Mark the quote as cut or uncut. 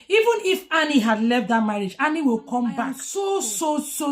cut